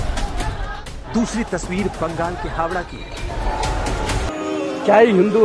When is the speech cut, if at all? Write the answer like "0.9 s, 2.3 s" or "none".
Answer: 4.4 s